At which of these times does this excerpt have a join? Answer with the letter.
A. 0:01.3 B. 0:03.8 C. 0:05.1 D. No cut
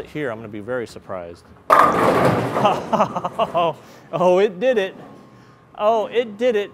D